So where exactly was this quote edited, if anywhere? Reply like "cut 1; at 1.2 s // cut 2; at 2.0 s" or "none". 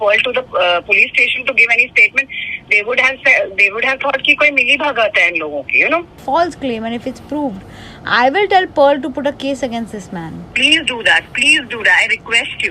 cut 1; at 6.2 s